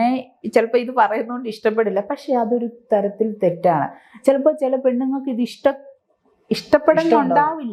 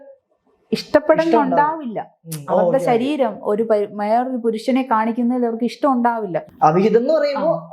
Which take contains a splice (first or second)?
second